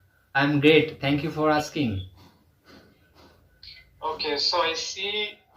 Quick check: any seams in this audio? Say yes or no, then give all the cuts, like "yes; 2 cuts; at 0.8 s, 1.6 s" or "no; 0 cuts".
no; 0 cuts